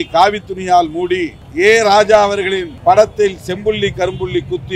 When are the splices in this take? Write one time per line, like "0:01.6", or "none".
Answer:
0:01.4
0:02.7